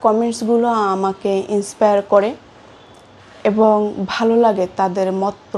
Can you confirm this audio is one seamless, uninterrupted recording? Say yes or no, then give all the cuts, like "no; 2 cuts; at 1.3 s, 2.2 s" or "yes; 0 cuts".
yes; 0 cuts